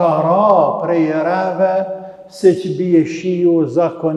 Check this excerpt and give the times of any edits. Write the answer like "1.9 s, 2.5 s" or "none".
none